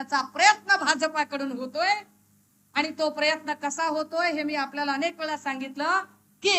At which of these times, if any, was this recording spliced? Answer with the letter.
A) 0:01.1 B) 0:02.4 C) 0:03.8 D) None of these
D